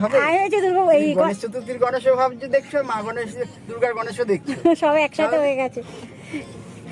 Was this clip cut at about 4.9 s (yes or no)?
no